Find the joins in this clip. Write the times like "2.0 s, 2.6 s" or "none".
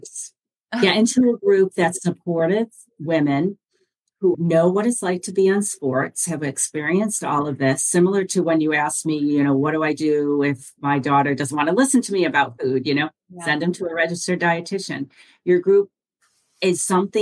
none